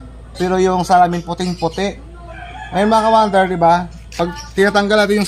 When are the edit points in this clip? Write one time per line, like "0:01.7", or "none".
none